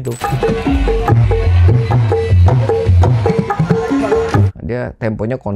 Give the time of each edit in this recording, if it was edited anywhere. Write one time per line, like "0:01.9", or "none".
0:02.0
0:03.3
0:04.5

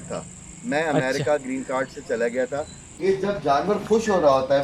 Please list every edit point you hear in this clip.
0:02.8

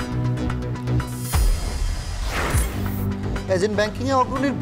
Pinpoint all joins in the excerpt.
none

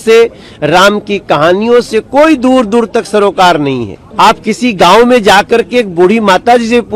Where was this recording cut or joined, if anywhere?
0:04.0

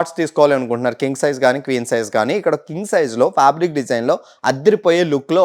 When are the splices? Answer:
none

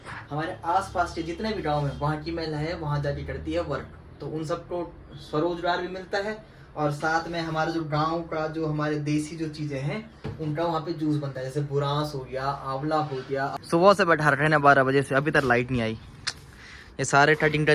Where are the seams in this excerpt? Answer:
0:13.6

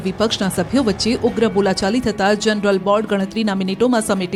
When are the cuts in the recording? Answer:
none

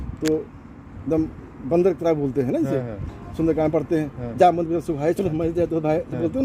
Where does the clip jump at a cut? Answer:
none

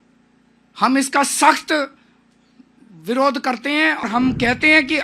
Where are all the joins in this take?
0:04.0

